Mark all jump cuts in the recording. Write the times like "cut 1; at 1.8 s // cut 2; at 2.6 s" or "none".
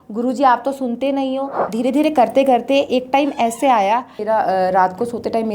cut 1; at 1.7 s // cut 2; at 4.2 s

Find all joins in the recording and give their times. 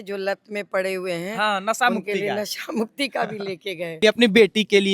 cut 1; at 4.0 s

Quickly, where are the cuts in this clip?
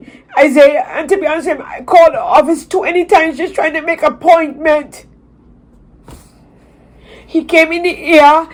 none

